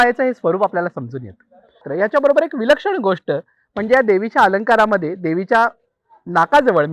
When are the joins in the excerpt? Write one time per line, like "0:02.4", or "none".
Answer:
0:01.9